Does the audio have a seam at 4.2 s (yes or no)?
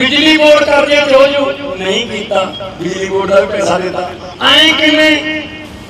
yes